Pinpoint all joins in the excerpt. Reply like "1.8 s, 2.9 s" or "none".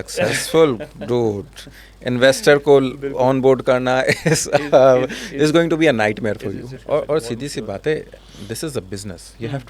6.7 s